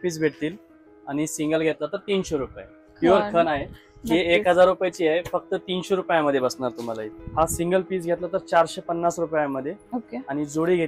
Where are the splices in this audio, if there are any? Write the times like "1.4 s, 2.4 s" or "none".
2.8 s, 7.0 s